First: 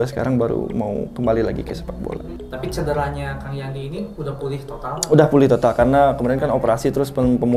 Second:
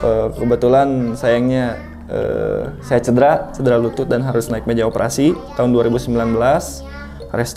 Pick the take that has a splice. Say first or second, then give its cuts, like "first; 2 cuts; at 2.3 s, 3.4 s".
first; 1 cut; at 2.3 s